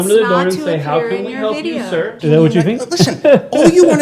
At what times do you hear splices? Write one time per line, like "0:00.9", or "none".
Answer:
0:02.1